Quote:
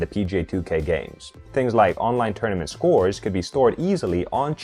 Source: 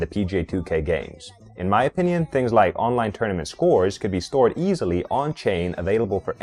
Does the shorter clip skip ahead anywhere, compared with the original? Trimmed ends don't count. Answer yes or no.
yes